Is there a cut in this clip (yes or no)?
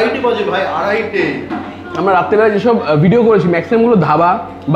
no